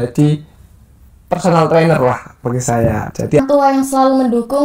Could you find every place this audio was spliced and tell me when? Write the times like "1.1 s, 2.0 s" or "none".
3.4 s